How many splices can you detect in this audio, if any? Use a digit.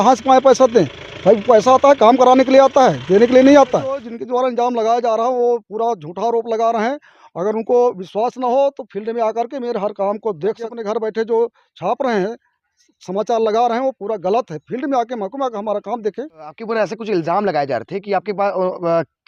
3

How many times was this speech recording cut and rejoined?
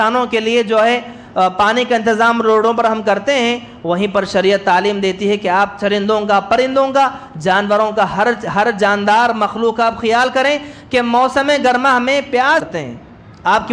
1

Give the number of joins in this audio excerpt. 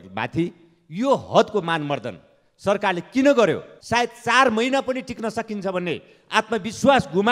1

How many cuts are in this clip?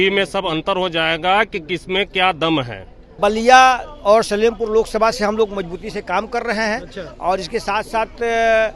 1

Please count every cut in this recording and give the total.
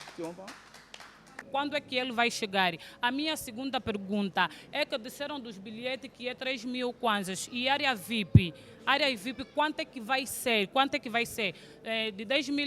1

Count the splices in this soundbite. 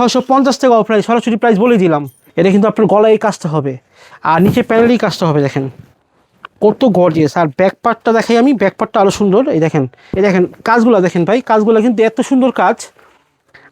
2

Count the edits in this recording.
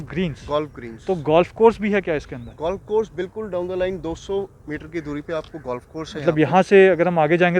0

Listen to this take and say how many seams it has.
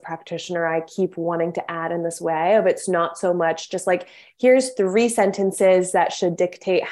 0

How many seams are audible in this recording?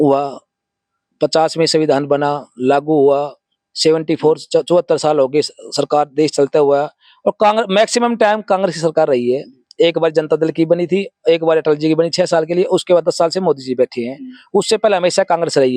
0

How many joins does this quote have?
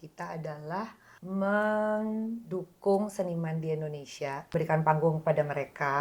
2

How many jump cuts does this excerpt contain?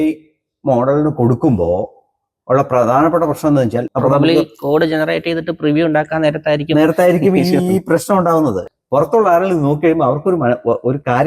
2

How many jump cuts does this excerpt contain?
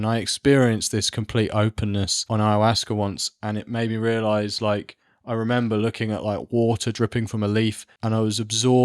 2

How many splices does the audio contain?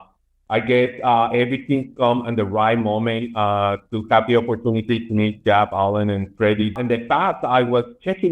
1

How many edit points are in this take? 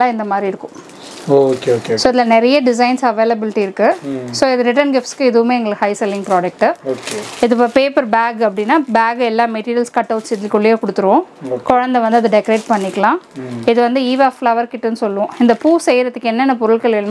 0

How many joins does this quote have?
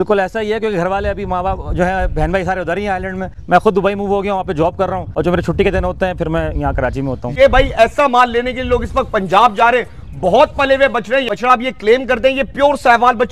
4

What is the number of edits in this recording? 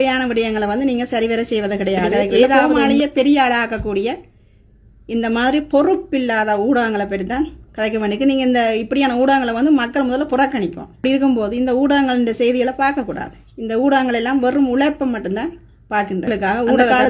2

